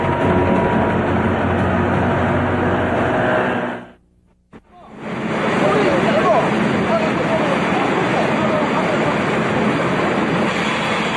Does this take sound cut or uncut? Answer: uncut